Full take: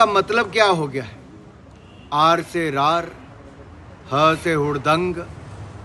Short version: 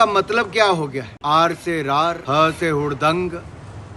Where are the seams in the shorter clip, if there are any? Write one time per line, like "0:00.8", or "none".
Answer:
0:01.1
0:02.2